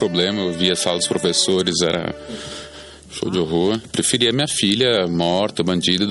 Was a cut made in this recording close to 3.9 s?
yes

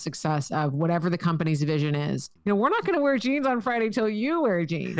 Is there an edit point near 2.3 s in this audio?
yes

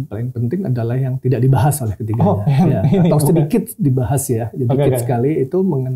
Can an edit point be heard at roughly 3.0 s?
no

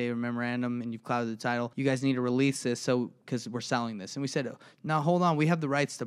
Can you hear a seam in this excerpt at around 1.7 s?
yes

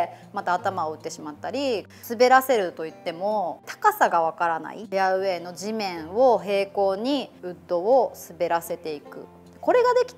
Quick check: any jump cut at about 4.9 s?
yes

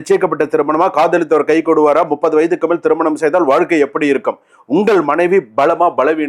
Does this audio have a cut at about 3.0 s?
no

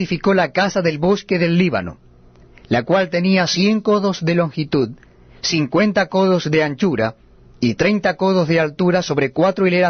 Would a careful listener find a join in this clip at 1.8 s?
no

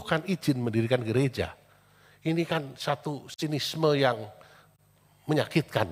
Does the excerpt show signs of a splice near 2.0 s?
no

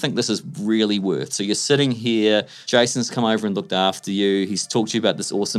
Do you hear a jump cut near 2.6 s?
yes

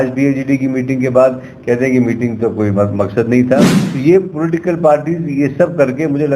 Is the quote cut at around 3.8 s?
yes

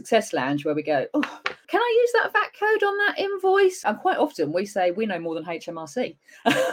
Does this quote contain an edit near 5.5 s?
no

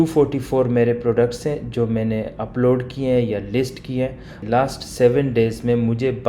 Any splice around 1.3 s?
no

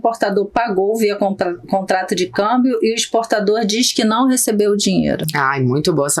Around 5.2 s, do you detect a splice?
no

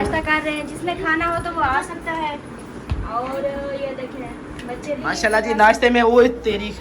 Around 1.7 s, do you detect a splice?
no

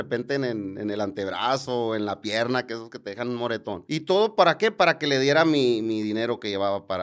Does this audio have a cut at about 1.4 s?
no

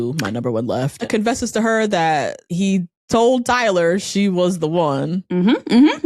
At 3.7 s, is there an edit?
no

